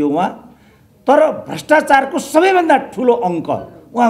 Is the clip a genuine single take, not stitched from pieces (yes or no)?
yes